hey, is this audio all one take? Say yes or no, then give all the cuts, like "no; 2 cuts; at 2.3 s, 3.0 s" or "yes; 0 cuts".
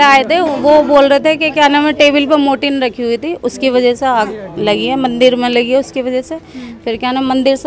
yes; 0 cuts